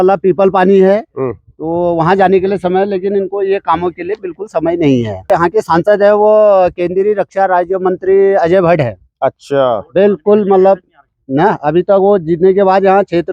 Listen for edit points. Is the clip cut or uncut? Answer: cut